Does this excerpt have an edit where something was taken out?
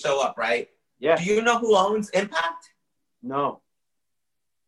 no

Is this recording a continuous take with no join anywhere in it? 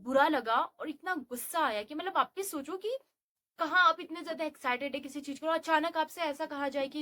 yes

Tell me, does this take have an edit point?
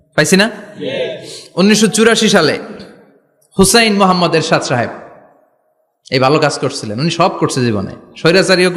no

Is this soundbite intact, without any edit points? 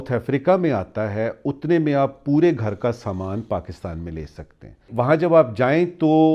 no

